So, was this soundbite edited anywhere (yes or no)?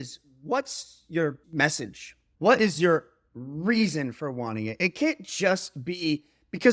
yes